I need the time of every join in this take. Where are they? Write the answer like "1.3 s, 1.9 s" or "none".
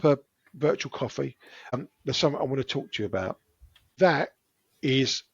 1.7 s